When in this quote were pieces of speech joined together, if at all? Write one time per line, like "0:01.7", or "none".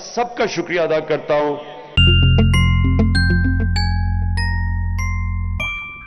0:01.8